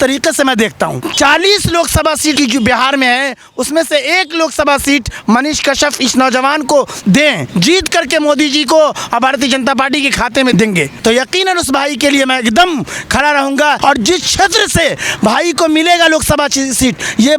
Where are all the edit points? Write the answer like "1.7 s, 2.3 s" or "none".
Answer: 1.0 s, 2.4 s, 7.4 s, 10.6 s, 13.8 s